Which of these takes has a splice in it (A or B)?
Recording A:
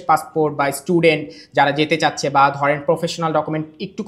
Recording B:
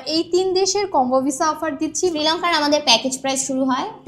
B